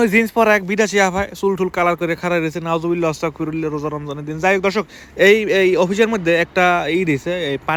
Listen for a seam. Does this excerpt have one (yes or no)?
no